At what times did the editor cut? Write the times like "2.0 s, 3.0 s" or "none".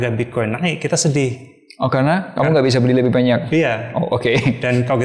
none